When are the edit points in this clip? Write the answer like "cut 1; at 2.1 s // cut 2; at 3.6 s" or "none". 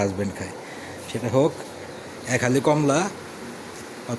none